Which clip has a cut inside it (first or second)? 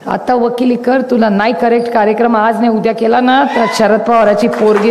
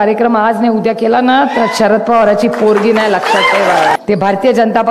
second